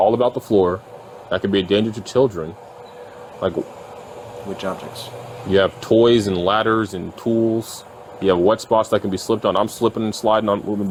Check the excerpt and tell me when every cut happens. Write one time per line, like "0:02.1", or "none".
none

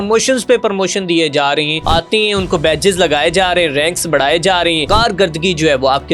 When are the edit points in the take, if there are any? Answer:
0:01.8
0:04.8

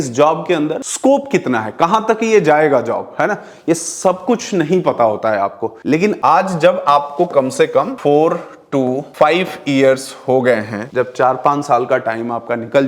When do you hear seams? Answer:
none

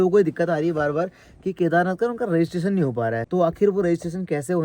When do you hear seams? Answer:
0:03.2

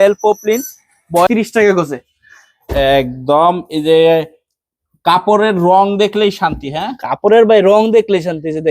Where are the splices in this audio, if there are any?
0:01.3

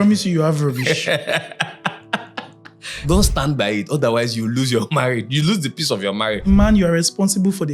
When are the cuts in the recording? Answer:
0:03.1
0:06.4

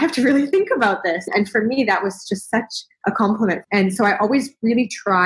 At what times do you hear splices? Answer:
0:02.8
0:03.6

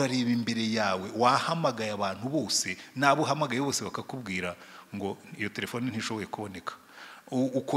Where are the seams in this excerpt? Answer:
none

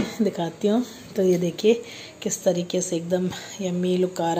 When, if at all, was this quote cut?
none

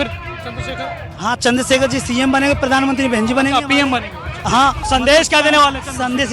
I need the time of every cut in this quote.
0:04.8

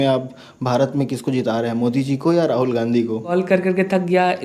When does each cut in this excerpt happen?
0:03.3

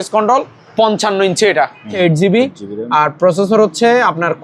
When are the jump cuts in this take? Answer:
0:02.0

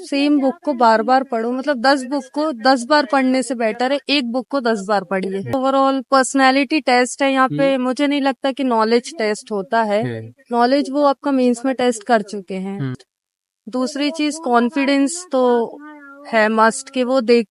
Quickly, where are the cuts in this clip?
0:05.5
0:12.9

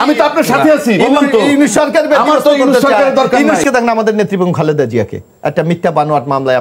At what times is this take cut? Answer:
0:03.6

